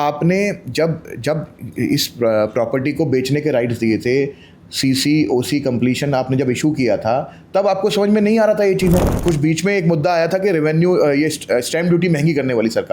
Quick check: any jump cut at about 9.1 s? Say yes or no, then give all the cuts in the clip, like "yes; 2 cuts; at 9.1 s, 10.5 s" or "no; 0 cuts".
yes; 1 cut; at 9.1 s